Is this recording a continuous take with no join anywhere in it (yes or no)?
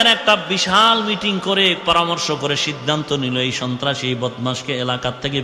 yes